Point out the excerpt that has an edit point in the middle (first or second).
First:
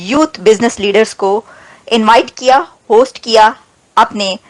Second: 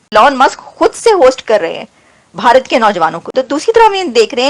second